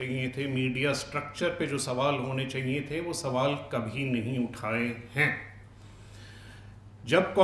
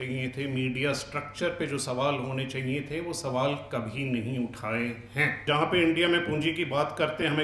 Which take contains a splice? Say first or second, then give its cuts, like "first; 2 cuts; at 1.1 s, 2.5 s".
second; 1 cut; at 5.4 s